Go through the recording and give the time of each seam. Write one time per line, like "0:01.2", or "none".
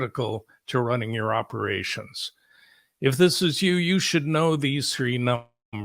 none